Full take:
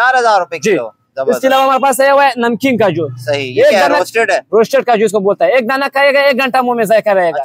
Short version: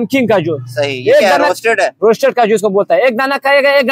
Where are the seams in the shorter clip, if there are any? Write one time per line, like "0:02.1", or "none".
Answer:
none